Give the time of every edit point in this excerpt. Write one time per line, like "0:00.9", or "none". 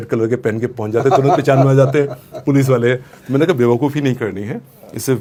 none